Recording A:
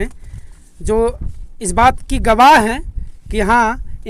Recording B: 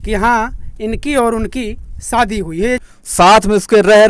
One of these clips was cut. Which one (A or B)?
B